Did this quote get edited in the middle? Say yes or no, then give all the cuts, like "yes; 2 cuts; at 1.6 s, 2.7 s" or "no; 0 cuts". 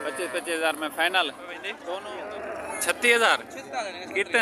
yes; 1 cut; at 1.8 s